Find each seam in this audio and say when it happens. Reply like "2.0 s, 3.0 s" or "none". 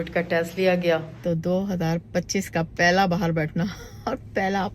1.1 s